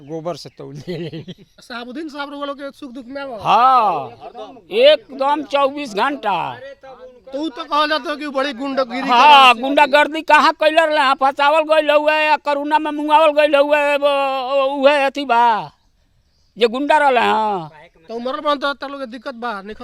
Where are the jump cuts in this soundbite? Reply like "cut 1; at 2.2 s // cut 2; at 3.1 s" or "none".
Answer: cut 1; at 1.5 s